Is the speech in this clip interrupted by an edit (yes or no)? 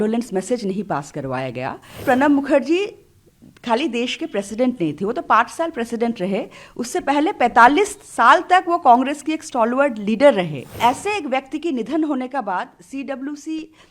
yes